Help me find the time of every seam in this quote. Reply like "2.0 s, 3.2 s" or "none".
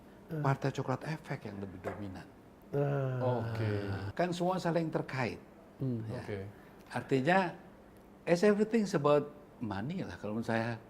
4.0 s

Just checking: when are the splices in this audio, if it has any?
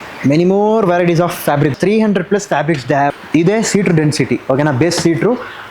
1.7 s, 3.2 s

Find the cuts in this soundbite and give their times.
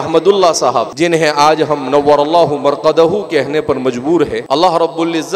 0.9 s, 4.4 s

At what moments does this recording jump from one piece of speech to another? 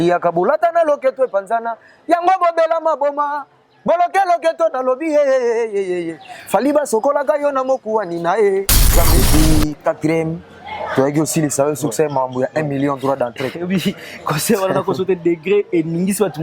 9.2 s

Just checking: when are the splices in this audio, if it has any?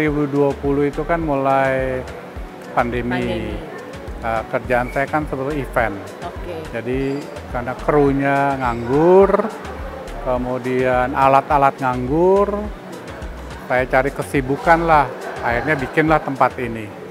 none

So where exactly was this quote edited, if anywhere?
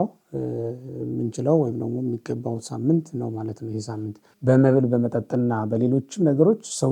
4.3 s

